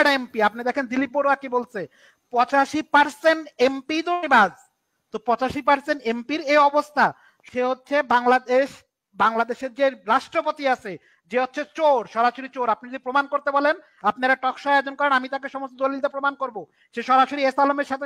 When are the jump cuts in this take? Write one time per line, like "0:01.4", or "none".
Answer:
0:07.3